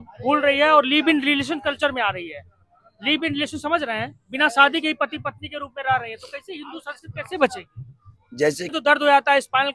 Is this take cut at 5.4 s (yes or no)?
no